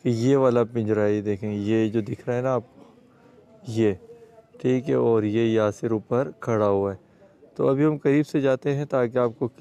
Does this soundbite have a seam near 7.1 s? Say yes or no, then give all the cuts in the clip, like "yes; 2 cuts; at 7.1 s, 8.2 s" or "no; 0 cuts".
no; 0 cuts